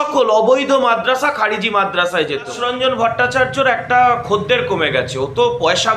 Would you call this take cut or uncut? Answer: cut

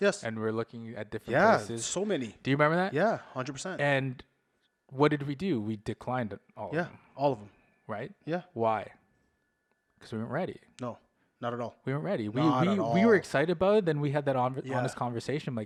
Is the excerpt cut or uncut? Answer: uncut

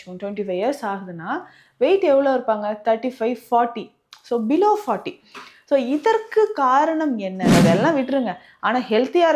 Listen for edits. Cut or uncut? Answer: cut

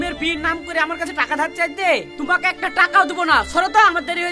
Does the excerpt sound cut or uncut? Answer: uncut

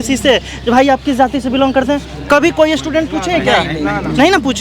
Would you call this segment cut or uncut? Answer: uncut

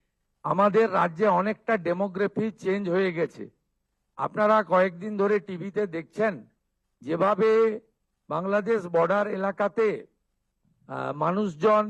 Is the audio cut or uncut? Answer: uncut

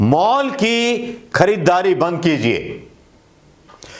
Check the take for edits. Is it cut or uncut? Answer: uncut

